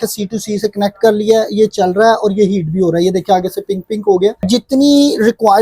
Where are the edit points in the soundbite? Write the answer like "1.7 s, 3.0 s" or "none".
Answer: 4.4 s